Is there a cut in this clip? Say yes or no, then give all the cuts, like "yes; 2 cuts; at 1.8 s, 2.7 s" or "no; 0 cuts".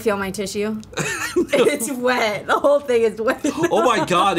no; 0 cuts